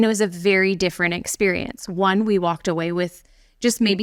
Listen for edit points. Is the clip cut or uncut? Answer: uncut